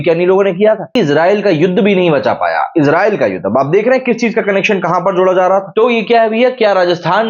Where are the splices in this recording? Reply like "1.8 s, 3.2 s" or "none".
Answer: 0.9 s, 5.7 s